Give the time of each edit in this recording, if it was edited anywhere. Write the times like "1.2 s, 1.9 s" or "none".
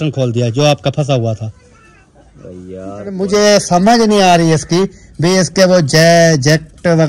3.1 s